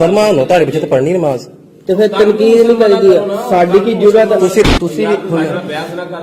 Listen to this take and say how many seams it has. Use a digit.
1